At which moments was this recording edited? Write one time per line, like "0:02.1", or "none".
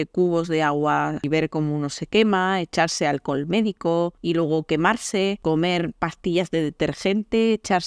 0:01.2
0:04.2
0:05.4